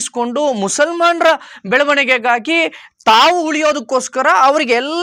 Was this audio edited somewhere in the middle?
no; 0 cuts

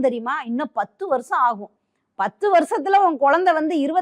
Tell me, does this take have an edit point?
no; 0 cuts

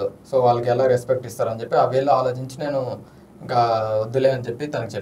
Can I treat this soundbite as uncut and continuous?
yes; 0 cuts

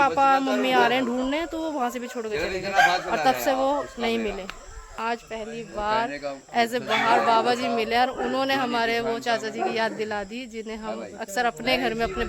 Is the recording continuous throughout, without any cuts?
no; 1 cut; at 4.9 s

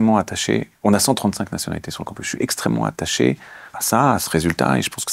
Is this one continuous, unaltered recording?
yes; 0 cuts

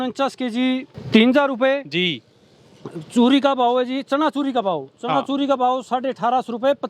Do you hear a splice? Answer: yes; 1 cut; at 0.9 s

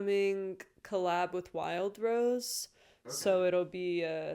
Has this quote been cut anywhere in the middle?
no; 0 cuts

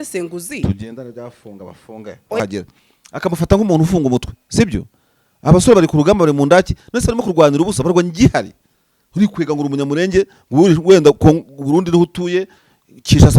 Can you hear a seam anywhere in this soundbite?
yes; 1 cut; at 2.4 s

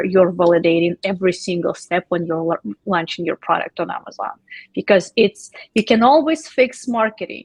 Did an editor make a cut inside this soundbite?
no; 0 cuts

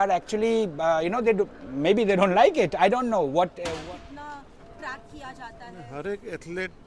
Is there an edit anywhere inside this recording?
yes; 1 cut; at 3.7 s

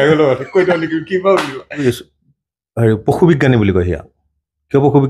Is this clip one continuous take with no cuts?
no; 1 cut; at 1.8 s

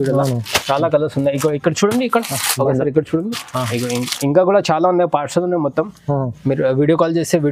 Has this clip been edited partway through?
no; 0 cuts

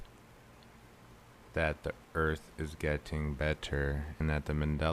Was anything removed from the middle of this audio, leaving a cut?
yes; 1 cut; at 3.6 s

